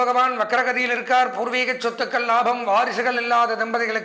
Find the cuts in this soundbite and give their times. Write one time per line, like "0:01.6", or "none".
none